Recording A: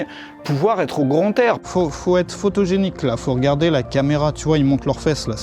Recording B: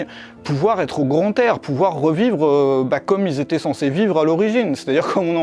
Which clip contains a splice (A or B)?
A